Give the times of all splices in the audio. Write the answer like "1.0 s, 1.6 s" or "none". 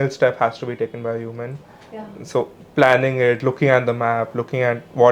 none